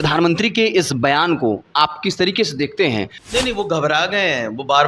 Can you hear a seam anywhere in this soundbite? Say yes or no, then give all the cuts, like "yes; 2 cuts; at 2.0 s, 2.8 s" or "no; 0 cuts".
yes; 1 cut; at 3.2 s